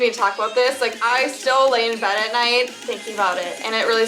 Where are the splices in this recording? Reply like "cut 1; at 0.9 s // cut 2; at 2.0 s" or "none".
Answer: none